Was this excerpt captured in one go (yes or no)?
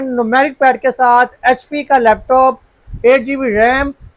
yes